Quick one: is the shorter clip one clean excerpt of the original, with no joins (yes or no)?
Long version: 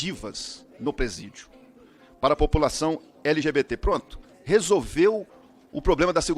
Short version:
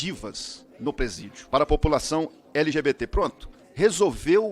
no